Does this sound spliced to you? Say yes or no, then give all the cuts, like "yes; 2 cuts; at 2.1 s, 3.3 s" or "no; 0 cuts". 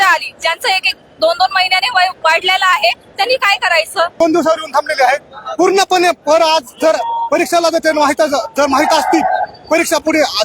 yes; 1 cut; at 4.2 s